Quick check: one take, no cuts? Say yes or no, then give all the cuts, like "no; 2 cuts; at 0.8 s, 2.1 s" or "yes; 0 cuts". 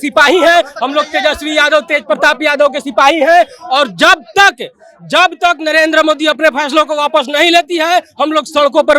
yes; 0 cuts